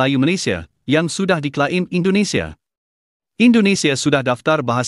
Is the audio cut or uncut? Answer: uncut